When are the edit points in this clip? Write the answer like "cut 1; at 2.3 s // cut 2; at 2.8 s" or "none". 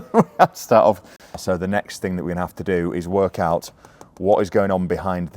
cut 1; at 1.4 s